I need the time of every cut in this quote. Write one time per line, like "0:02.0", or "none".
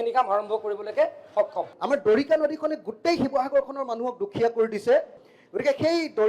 0:01.7
0:05.2